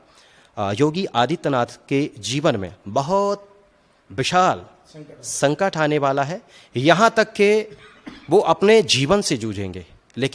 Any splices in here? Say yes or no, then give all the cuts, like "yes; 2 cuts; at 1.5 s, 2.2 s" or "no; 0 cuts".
no; 0 cuts